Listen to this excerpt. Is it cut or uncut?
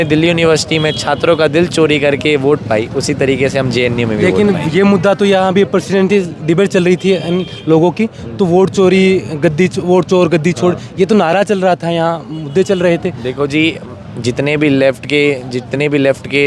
uncut